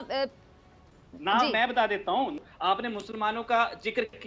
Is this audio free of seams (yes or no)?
no